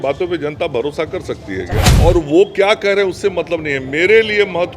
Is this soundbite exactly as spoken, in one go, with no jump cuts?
no; 1 cut; at 1.9 s

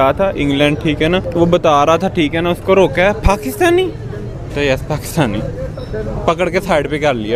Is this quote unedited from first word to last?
yes; 0 cuts

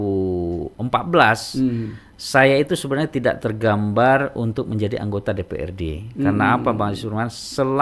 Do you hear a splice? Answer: no; 0 cuts

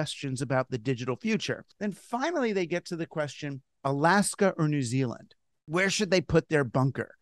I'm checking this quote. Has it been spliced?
yes; 2 cuts; at 1.7 s, 5.7 s

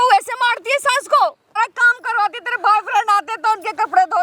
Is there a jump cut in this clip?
yes; 1 cut; at 1.6 s

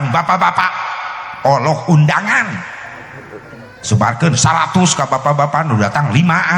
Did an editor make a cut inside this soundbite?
no; 0 cuts

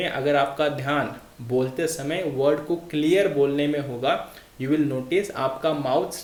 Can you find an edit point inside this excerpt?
no; 0 cuts

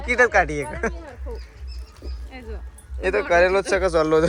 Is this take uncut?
yes; 0 cuts

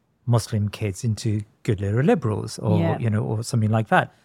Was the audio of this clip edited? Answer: no; 0 cuts

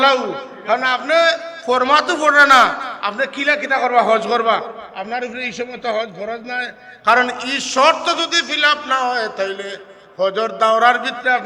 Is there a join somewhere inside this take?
no; 0 cuts

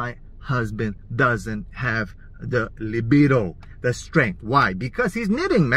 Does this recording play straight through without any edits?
yes; 0 cuts

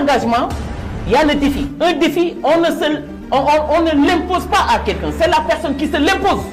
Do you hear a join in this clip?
no; 0 cuts

